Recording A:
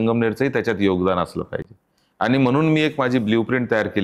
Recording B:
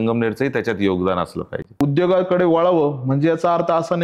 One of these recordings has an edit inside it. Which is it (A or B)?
B